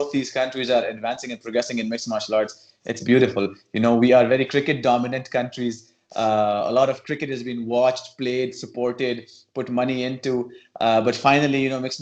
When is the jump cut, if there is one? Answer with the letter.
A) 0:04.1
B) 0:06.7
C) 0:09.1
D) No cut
D